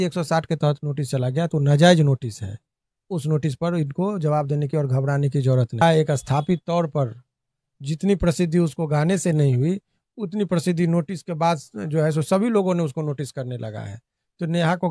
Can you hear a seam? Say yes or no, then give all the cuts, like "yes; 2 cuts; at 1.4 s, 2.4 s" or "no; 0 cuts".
yes; 1 cut; at 5.8 s